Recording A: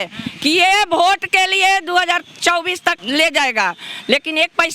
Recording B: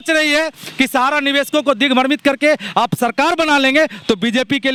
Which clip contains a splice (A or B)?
A